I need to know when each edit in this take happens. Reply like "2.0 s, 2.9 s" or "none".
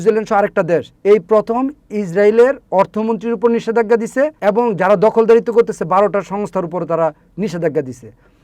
0.9 s, 4.3 s